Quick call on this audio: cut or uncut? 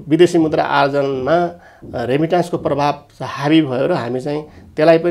uncut